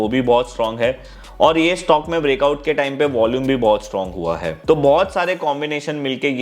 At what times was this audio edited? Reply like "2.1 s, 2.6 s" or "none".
4.5 s